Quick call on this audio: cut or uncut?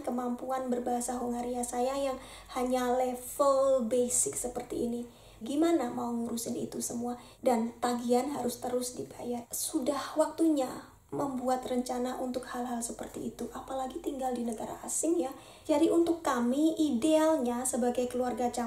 cut